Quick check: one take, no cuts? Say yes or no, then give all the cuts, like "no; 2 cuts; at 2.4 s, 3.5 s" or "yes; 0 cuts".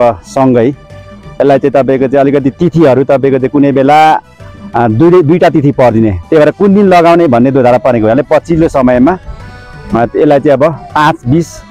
yes; 0 cuts